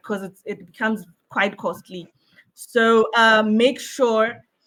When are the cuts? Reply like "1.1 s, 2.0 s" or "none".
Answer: none